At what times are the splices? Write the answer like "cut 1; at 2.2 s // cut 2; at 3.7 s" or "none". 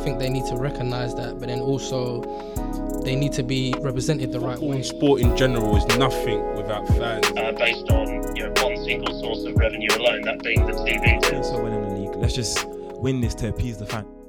none